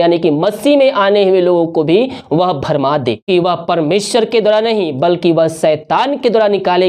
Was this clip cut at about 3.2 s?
yes; 1 cut; at 3.2 s

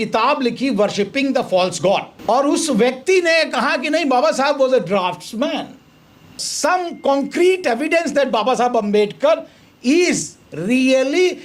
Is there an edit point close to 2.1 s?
yes; 2 cuts; at 2.1 s, 6.4 s

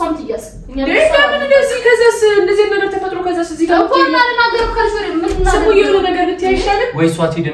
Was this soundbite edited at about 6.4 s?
no; 0 cuts

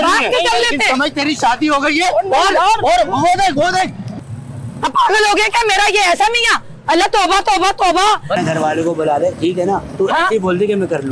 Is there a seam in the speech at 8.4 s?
yes; 2 cuts; at 4.1 s, 8.4 s

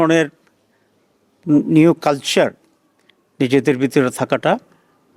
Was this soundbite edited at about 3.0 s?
no; 0 cuts

